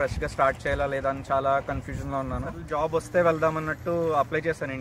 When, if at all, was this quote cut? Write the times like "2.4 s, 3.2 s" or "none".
2.6 s